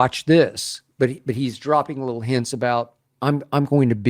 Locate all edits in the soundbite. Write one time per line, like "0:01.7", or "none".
0:03.0